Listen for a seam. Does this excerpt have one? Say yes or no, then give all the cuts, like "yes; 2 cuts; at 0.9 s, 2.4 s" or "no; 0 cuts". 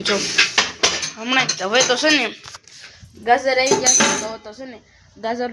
no; 0 cuts